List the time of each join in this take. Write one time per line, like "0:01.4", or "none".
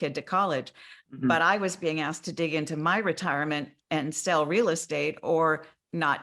0:01.0